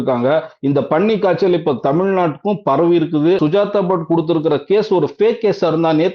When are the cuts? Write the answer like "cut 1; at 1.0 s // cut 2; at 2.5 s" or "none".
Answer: cut 1; at 3.4 s